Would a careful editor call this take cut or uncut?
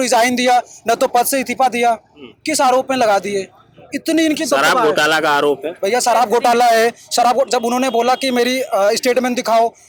uncut